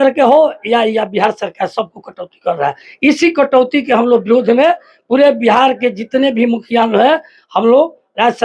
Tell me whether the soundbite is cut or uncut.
uncut